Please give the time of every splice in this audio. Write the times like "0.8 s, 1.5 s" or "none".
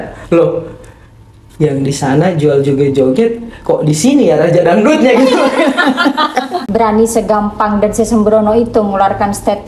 6.5 s